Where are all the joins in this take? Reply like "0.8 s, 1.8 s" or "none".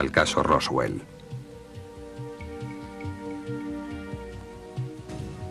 none